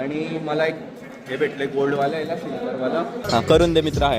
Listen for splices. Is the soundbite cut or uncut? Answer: cut